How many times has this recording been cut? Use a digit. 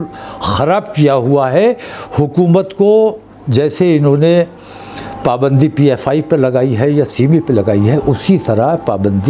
0